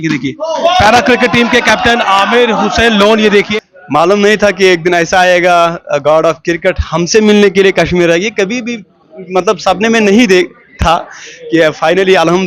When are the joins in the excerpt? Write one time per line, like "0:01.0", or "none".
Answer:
0:03.5